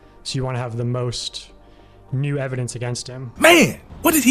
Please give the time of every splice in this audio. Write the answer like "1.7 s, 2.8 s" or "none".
none